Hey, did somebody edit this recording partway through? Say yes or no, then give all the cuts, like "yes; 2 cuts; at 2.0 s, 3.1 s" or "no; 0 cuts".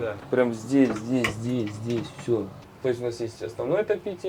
yes; 1 cut; at 2.6 s